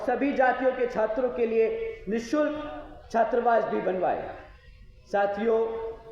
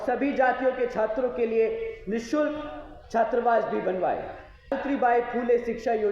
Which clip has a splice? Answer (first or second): second